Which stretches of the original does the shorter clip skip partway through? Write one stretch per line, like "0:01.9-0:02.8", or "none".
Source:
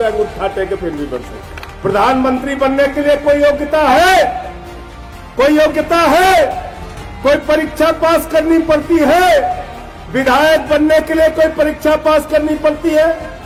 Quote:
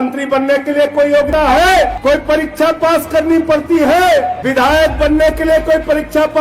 0:03.6-0:03.7
0:04.4-0:07.2
0:09.6-0:10.1